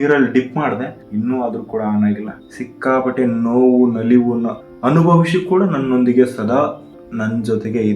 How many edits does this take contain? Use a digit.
2